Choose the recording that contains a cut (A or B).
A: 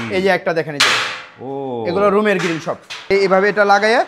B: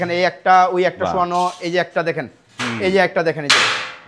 A